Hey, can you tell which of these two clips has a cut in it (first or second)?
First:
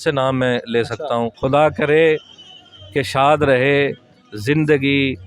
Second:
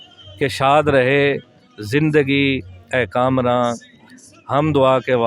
first